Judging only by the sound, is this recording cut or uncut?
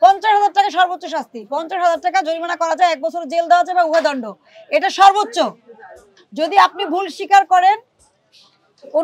uncut